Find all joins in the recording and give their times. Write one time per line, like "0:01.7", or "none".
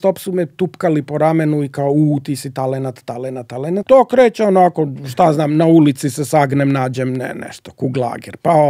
0:03.8